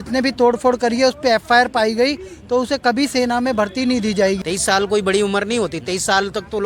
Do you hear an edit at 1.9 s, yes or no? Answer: no